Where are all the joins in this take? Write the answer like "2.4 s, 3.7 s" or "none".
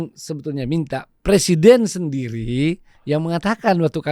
none